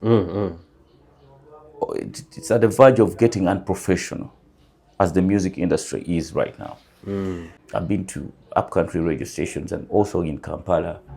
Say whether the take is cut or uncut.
cut